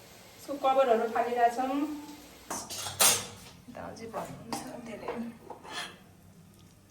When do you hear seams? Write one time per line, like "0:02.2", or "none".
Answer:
0:02.7